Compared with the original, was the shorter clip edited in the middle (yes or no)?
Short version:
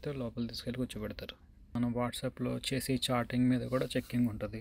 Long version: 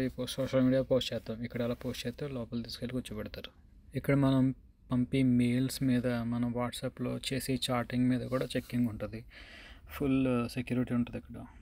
yes